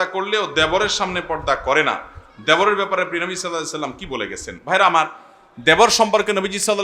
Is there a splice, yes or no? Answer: no